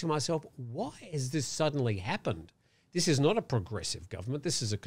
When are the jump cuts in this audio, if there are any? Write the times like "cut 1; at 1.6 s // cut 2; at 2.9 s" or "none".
none